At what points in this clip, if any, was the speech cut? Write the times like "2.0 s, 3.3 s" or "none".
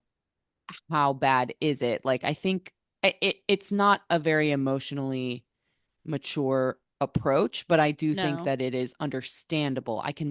none